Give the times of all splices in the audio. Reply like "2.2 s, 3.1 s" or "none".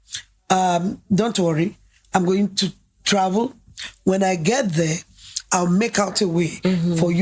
none